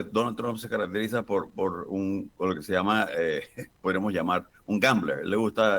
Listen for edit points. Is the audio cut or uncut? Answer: uncut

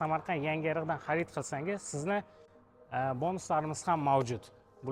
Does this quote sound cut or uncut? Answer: uncut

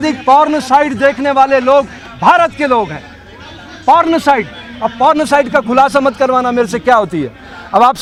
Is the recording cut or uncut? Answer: uncut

